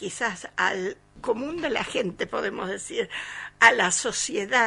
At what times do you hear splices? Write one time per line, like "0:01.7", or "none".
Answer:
0:01.1